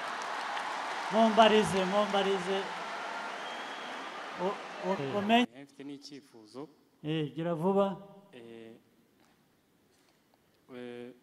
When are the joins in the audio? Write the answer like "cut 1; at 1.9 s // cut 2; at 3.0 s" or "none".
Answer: cut 1; at 5.5 s